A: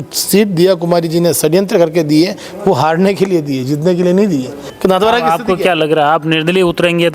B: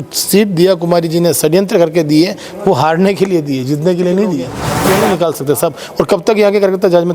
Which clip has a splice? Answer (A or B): B